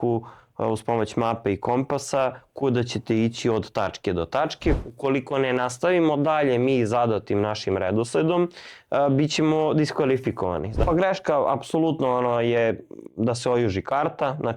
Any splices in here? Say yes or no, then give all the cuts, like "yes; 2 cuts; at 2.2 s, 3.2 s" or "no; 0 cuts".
yes; 2 cuts; at 4.8 s, 10.8 s